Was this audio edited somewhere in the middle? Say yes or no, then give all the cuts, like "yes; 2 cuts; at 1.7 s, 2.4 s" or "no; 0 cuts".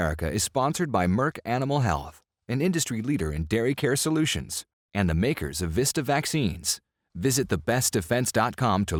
no; 0 cuts